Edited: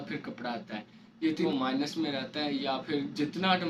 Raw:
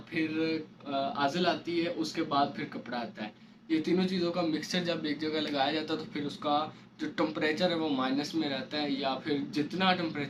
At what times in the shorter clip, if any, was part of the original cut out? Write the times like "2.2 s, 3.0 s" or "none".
1.5 s